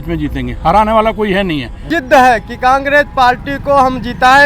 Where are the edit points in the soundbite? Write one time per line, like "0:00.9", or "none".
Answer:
0:01.8